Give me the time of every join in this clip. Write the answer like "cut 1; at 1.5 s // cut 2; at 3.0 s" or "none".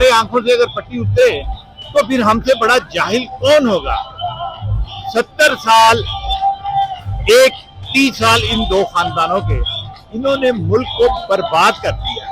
none